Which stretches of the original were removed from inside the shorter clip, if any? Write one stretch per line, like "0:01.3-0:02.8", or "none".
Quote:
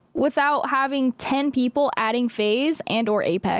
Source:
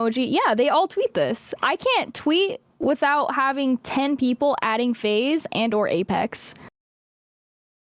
none